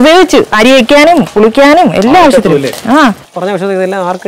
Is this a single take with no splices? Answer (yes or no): no